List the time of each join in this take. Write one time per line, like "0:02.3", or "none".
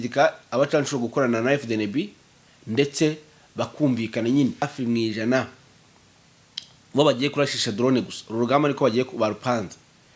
0:04.7